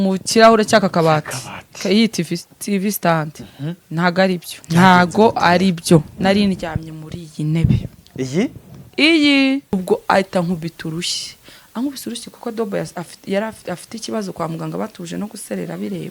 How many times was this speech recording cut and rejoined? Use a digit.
2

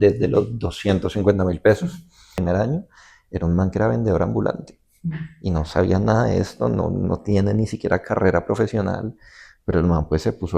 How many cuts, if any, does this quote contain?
1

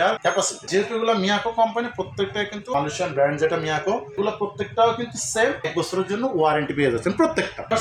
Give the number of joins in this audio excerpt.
0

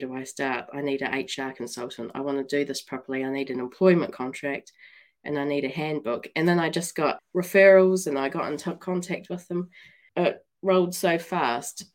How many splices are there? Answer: 2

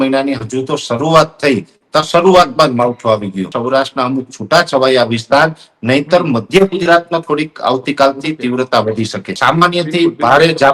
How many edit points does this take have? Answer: 2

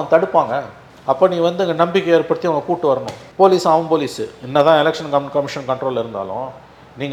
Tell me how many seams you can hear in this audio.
0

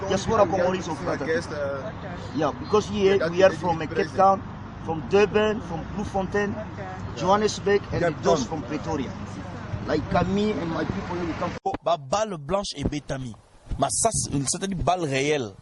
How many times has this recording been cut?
1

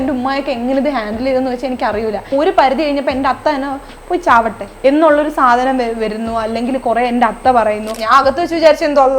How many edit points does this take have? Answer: 3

